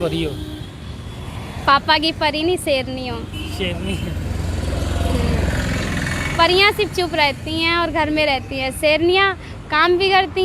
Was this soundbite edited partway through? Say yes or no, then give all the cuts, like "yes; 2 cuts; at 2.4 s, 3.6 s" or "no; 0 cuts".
no; 0 cuts